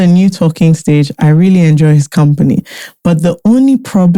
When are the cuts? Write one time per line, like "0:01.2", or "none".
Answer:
none